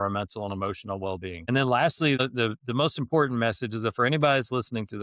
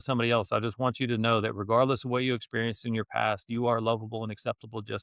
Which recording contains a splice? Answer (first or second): first